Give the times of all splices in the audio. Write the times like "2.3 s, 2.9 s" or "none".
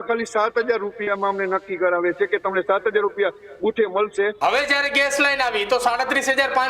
4.4 s